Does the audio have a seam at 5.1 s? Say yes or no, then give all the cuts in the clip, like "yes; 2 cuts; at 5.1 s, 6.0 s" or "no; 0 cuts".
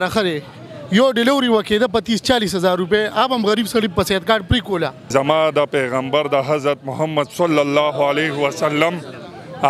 yes; 1 cut; at 5.1 s